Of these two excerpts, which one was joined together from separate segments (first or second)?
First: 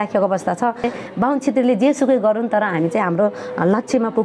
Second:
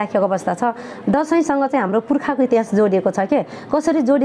first